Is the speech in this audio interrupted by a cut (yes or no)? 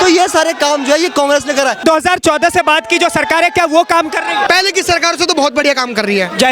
yes